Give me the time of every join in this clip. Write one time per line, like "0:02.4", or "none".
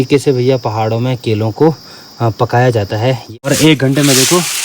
0:03.2